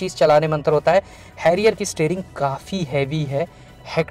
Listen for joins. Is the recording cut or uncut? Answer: uncut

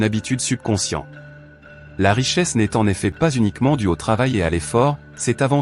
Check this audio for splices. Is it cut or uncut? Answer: uncut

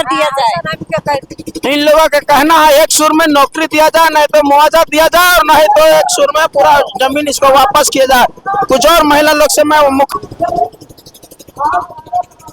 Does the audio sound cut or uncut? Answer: uncut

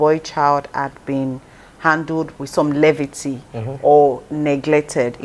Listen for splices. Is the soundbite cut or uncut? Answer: cut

